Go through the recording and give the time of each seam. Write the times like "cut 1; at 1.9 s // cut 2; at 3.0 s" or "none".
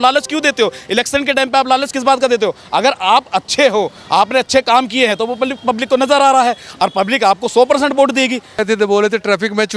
cut 1; at 8.6 s